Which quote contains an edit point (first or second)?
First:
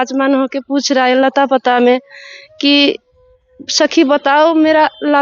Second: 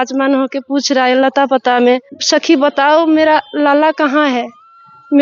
second